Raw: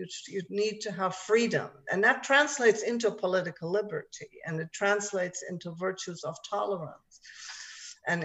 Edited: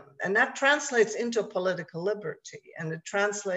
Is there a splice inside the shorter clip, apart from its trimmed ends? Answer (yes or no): no